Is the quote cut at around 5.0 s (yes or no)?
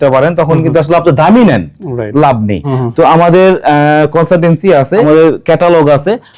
yes